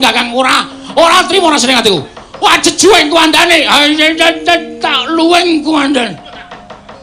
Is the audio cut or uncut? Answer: cut